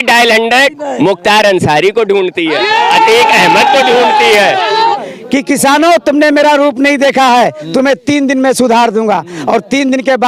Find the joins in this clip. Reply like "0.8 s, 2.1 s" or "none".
5.0 s